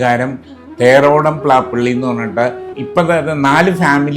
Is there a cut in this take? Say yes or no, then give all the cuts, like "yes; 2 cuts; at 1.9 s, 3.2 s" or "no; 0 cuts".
no; 0 cuts